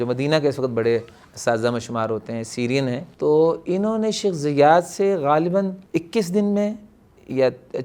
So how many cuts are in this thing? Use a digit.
2